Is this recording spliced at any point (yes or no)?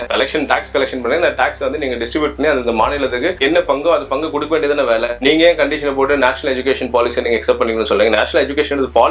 no